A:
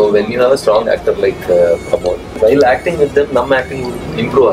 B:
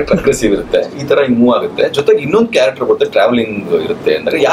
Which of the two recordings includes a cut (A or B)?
A